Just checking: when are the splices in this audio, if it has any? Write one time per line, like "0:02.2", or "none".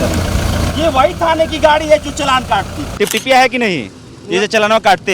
0:02.8

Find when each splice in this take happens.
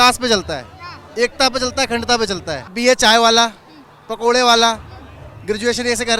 0:02.6

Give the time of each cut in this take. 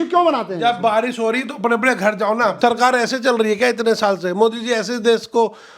0:02.6

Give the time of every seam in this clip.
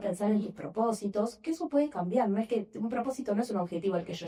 none

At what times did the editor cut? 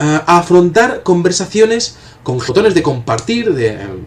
none

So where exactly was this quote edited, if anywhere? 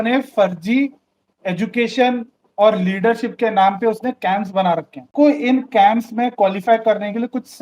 0:05.1

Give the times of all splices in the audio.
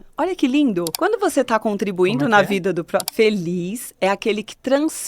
0:00.9
0:03.1

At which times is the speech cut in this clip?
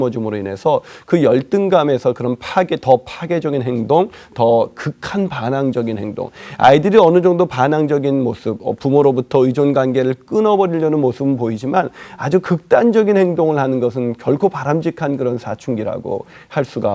none

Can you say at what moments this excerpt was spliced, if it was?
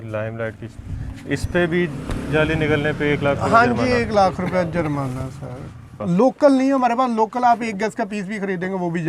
0:05.9

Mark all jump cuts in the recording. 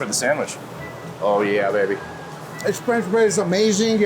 0:02.4

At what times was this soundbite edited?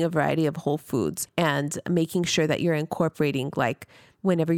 0:01.2

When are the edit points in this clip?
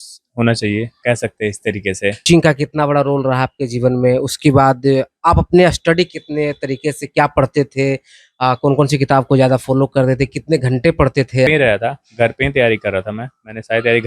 0:01.0
0:02.3
0:11.5

